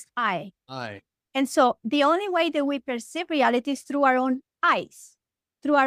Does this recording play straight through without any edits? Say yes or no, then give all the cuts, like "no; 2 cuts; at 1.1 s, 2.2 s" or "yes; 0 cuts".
yes; 0 cuts